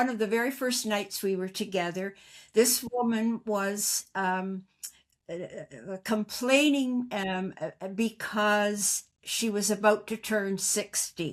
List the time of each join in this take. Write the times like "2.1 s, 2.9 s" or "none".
none